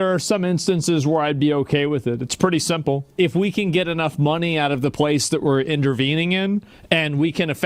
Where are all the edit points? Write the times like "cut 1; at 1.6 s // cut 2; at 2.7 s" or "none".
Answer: cut 1; at 3.1 s